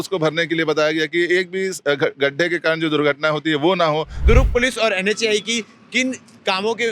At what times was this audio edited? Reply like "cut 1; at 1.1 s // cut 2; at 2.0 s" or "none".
cut 1; at 4.2 s